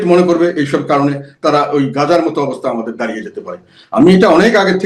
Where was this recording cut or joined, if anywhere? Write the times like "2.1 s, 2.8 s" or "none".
none